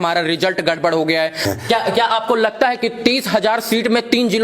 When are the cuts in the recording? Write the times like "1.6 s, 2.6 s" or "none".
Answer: 1.4 s